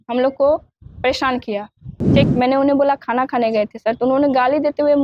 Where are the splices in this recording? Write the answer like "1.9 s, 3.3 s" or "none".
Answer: 2.3 s